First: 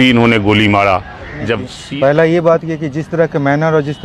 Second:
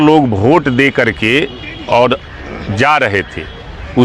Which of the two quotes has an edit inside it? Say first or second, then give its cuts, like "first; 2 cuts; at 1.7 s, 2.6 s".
first; 1 cut; at 1.7 s